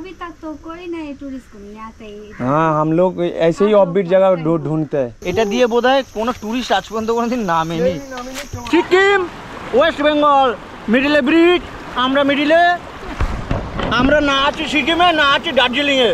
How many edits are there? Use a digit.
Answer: 2